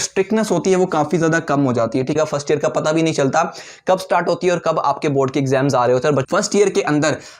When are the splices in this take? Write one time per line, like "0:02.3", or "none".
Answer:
0:02.1
0:06.2